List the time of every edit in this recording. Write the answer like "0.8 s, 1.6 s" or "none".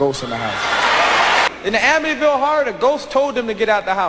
1.5 s